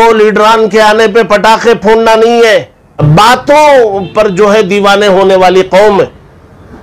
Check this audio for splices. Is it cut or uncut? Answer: cut